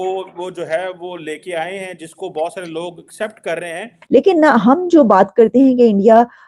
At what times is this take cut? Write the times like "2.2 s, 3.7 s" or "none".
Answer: 4.0 s